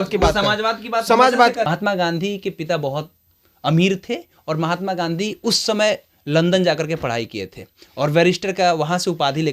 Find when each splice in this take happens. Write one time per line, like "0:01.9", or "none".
0:01.7